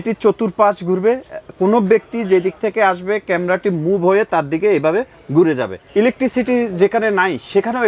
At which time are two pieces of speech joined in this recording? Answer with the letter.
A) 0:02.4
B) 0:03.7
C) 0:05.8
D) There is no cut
C